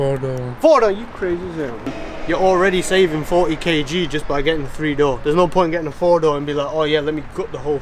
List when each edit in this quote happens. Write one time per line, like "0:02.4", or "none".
0:02.0